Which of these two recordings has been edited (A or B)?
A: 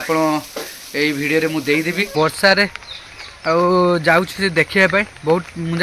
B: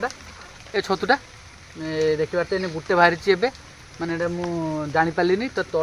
A